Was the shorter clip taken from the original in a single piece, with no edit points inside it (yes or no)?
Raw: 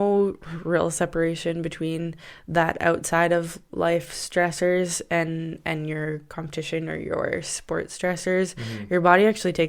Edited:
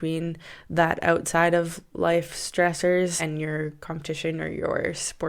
no